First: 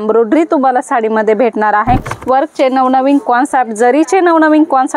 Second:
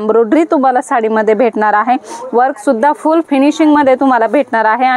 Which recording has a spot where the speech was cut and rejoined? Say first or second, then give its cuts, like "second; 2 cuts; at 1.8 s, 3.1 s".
first; 1 cut; at 2.1 s